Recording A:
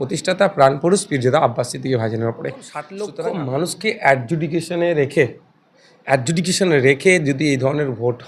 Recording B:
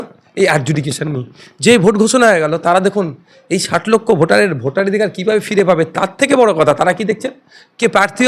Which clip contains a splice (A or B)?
A